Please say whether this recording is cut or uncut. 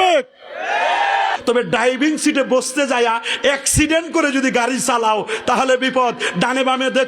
cut